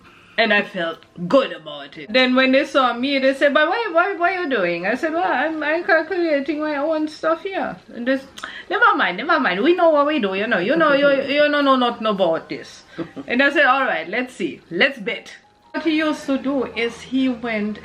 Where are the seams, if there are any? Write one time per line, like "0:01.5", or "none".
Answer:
0:02.1
0:15.8